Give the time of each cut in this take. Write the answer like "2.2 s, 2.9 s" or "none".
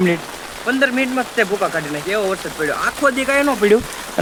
none